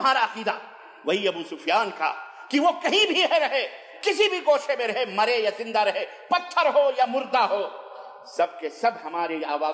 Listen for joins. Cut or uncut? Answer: uncut